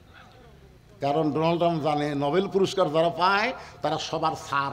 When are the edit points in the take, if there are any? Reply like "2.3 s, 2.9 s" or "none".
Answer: none